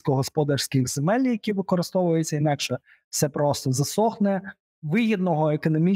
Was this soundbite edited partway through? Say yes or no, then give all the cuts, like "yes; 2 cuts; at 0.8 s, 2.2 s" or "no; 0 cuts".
no; 0 cuts